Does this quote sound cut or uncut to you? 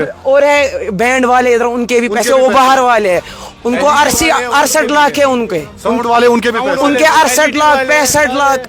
uncut